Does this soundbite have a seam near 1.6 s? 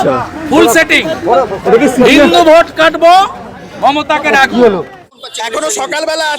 no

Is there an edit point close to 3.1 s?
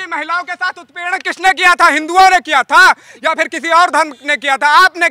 no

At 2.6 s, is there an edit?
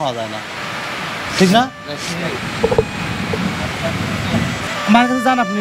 no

